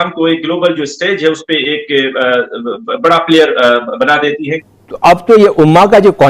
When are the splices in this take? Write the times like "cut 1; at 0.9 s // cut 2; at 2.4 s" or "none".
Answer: cut 1; at 4.7 s